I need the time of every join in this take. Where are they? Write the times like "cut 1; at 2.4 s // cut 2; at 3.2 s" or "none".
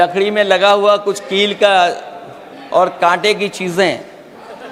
none